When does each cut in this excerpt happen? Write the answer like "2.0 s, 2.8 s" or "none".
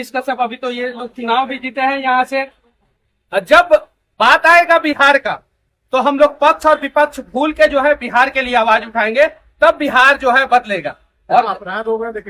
none